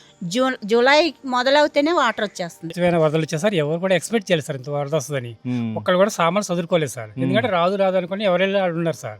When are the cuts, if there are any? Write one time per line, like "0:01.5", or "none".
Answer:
0:02.7